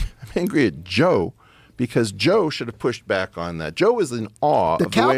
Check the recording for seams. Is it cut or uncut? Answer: uncut